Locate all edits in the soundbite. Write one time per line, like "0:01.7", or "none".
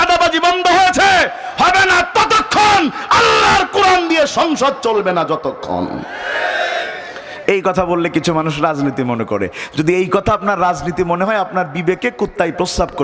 none